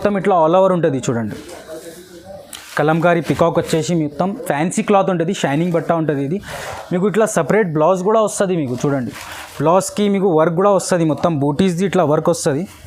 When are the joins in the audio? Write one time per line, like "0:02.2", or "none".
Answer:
none